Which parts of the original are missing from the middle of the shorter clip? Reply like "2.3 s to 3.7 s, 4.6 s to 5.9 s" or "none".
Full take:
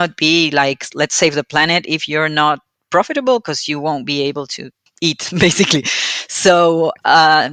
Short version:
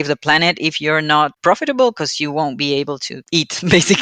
2.6 s to 2.8 s, 4.6 s to 4.8 s